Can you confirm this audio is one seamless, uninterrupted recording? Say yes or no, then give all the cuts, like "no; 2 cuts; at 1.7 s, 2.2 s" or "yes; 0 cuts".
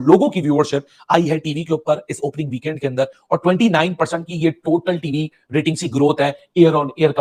yes; 0 cuts